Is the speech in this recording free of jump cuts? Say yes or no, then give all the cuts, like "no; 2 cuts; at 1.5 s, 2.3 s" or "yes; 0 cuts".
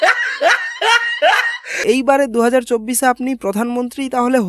no; 1 cut; at 1.8 s